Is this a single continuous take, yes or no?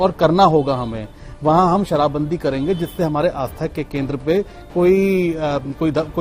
yes